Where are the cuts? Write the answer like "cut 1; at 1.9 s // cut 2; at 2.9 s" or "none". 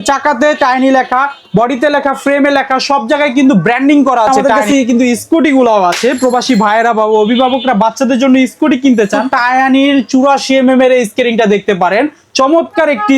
cut 1; at 4.3 s // cut 2; at 9.3 s